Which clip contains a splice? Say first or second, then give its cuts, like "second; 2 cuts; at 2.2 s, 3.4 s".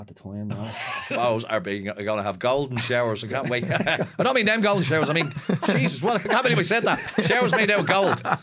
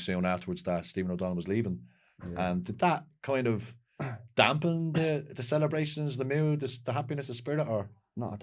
first; 1 cut; at 1.0 s